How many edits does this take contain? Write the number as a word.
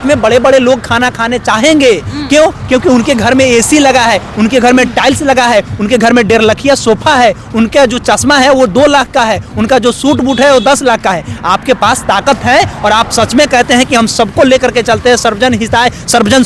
zero